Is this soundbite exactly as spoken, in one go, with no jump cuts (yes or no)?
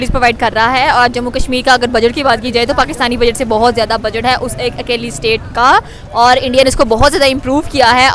yes